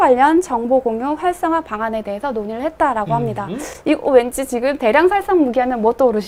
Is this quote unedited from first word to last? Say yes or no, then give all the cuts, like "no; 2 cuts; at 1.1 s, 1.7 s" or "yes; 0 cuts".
yes; 0 cuts